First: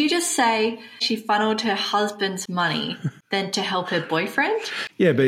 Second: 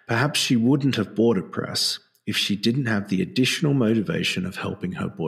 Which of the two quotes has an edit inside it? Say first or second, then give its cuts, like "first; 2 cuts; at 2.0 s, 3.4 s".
first; 2 cuts; at 1.1 s, 3.1 s